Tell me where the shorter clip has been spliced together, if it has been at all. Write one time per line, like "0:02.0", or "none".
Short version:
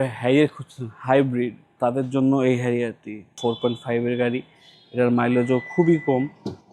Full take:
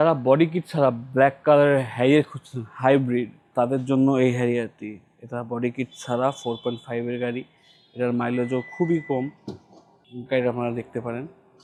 0:03.4